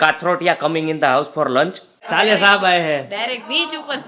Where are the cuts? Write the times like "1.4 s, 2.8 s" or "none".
2.0 s